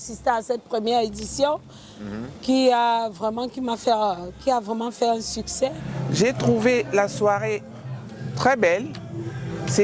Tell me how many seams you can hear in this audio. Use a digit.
1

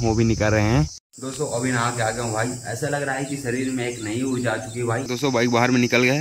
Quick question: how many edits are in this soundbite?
2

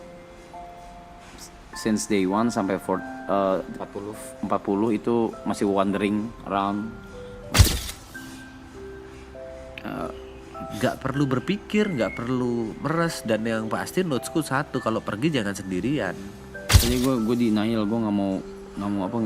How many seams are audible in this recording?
2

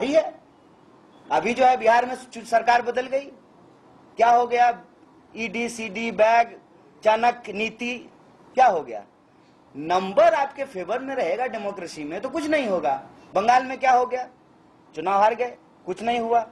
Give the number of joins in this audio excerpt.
0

